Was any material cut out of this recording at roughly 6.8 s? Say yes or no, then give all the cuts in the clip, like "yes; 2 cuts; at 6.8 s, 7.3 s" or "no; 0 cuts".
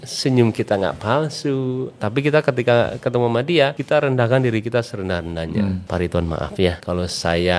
yes; 4 cuts; at 2.0 s, 3.8 s, 5.8 s, 6.8 s